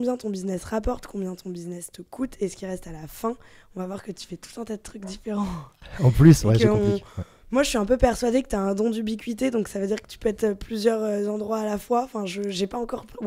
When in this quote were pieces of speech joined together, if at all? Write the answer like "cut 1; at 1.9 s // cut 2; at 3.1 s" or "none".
none